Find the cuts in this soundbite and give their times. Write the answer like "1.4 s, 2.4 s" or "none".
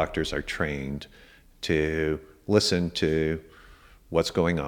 none